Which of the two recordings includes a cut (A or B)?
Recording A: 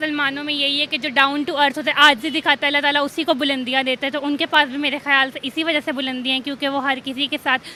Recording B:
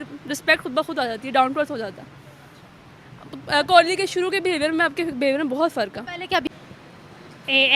B